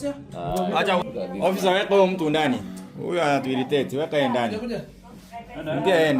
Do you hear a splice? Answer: yes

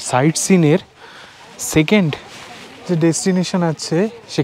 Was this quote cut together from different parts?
no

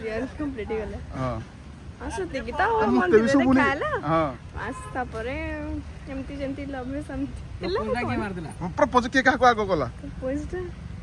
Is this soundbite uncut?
yes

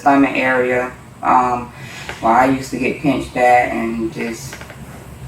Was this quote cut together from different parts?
no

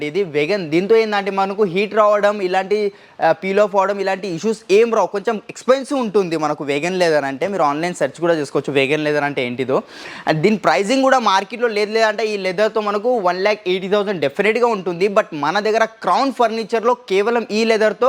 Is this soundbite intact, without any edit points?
yes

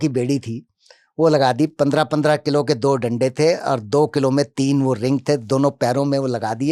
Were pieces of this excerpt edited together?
no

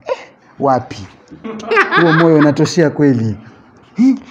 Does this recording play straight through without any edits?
yes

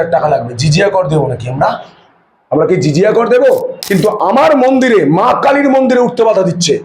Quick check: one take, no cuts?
no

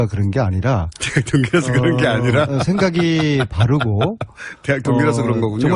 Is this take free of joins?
yes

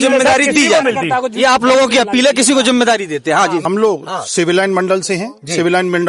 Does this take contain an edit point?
yes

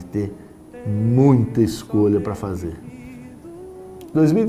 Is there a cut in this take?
yes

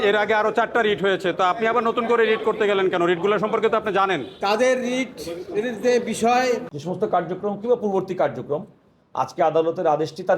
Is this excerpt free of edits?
no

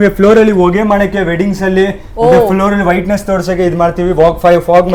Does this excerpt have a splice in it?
no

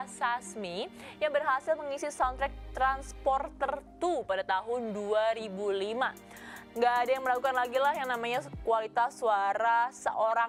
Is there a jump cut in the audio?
no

